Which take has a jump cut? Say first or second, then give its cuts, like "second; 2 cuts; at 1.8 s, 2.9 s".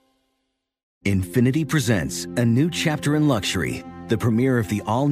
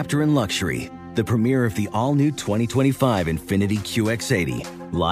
first; 1 cut; at 0.9 s